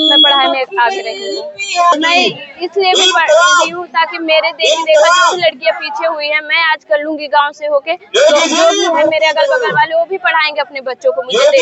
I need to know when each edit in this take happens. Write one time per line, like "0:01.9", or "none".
0:01.9